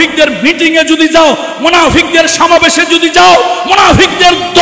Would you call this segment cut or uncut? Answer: uncut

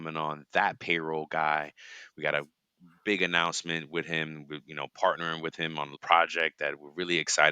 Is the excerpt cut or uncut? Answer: cut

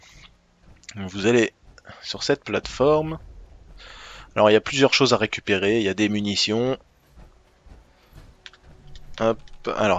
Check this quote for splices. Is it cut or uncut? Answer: uncut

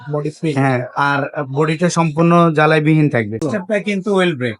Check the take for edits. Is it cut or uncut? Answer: cut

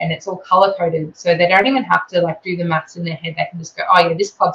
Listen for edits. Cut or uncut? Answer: uncut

